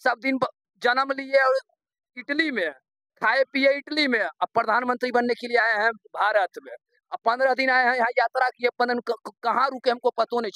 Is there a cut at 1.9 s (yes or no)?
no